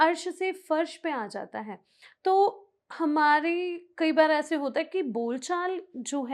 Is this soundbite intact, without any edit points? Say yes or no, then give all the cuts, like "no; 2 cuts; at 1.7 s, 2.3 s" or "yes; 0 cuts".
yes; 0 cuts